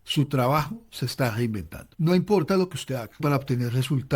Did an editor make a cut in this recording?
yes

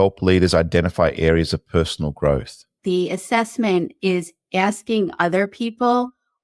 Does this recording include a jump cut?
yes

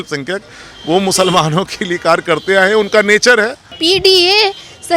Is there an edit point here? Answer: yes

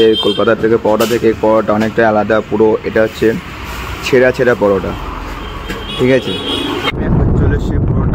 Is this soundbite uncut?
no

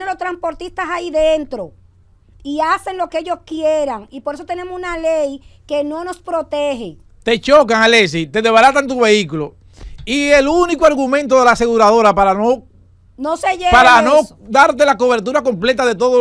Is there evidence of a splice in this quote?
no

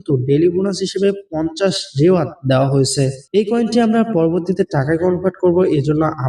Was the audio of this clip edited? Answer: yes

